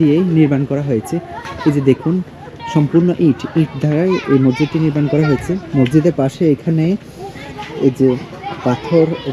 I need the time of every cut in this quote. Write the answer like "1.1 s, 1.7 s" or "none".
none